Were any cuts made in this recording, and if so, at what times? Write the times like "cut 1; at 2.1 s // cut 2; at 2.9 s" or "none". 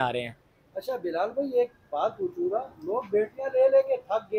none